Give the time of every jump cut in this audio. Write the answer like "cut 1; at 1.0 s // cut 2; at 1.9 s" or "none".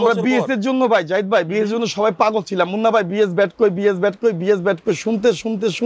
none